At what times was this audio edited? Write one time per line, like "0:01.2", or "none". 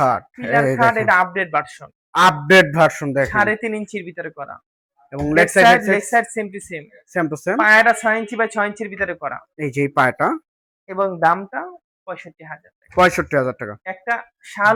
none